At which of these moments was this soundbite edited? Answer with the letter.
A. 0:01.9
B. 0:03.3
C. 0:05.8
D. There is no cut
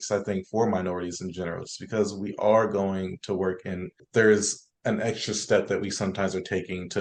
D